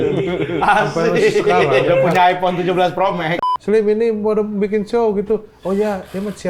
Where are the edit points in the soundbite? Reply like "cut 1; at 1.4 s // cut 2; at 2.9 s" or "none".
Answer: cut 1; at 3.4 s